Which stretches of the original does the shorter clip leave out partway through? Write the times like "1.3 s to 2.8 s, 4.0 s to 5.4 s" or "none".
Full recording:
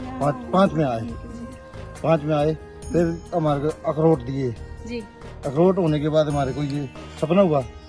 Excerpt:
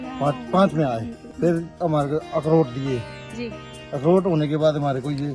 1.2 s to 2.7 s

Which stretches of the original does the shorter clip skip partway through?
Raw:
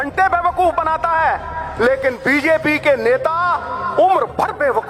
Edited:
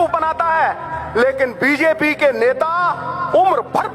none

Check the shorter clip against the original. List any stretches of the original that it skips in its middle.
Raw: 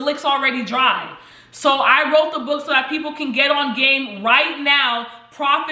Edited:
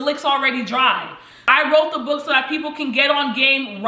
1.5 s to 1.9 s

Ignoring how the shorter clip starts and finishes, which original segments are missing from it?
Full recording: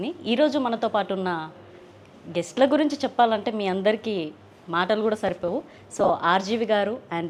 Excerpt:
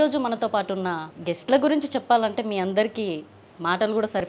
1.5 s to 2.2 s

